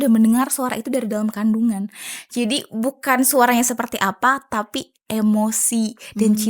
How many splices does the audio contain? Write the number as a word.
zero